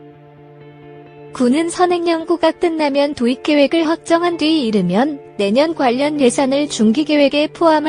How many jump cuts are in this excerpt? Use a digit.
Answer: 1